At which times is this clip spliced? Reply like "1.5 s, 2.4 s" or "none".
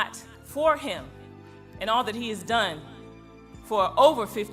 2.4 s